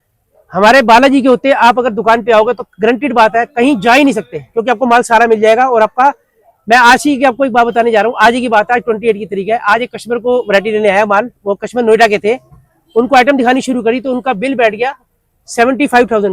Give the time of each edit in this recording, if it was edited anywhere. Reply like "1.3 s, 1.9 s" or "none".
none

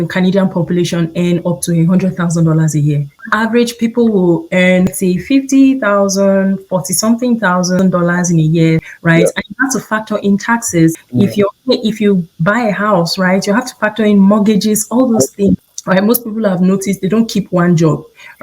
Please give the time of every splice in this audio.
3.2 s, 4.9 s, 7.8 s, 8.9 s, 11.0 s, 15.7 s

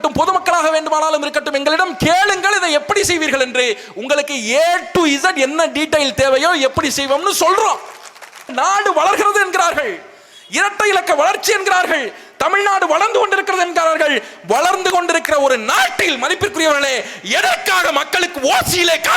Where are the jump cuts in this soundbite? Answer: 8.5 s

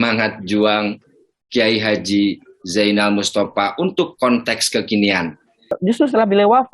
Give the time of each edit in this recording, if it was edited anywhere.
5.7 s

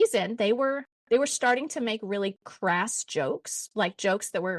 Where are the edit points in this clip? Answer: none

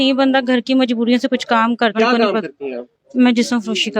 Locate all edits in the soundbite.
1.9 s

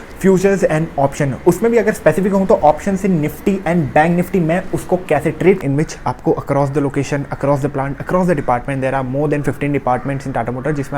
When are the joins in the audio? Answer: 5.6 s

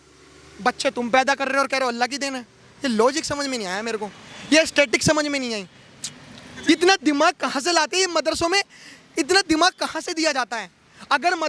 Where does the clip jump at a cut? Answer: none

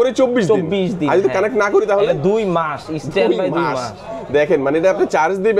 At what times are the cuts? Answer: none

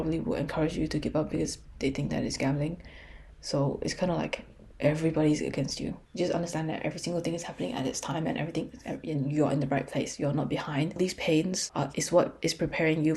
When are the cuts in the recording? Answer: 6.0 s, 11.0 s

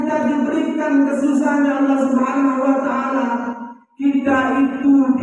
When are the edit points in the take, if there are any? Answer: none

